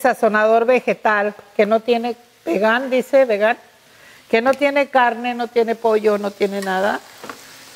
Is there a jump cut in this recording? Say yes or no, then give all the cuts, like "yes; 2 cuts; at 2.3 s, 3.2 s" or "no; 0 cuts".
no; 0 cuts